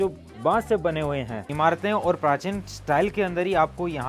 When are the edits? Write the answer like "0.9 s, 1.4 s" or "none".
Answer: 1.4 s

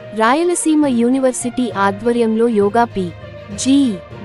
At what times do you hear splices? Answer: none

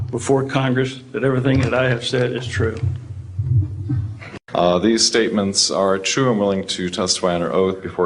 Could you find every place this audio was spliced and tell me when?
4.3 s

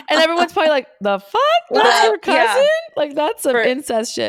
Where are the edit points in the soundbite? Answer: none

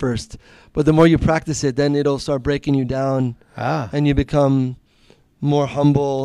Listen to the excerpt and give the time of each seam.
none

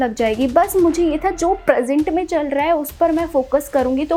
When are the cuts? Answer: none

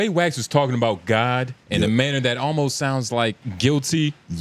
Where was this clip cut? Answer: 1.6 s, 3.5 s

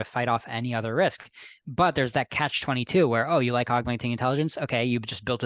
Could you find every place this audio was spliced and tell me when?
none

